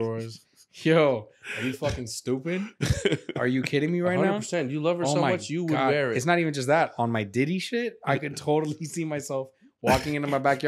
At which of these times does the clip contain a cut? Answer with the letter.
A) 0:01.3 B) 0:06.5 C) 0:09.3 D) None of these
D